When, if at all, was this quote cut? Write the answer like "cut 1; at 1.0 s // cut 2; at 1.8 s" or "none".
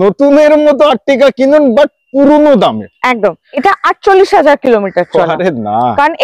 cut 1; at 3.6 s